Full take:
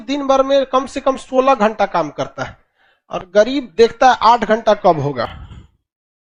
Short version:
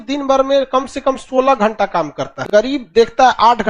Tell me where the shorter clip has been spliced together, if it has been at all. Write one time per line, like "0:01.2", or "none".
0:02.8